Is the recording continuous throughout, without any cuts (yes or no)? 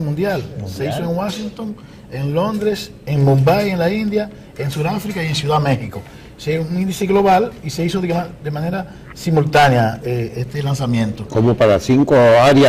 yes